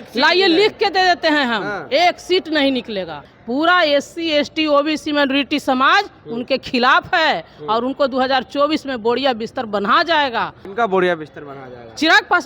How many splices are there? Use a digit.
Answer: 2